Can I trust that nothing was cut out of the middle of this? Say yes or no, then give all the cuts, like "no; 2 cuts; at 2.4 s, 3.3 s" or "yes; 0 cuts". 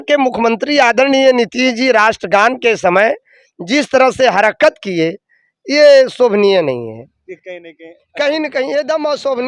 yes; 0 cuts